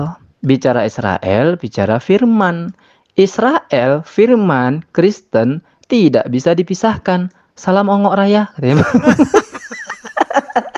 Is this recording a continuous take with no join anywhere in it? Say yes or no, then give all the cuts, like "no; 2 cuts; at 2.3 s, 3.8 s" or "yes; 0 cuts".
yes; 0 cuts